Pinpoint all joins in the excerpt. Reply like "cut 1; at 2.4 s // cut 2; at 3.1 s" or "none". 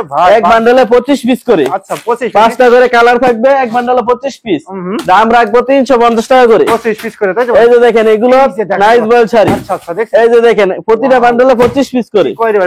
none